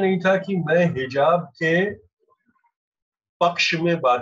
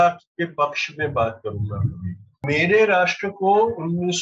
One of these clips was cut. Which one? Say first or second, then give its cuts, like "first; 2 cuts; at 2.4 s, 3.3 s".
second; 1 cut; at 2.4 s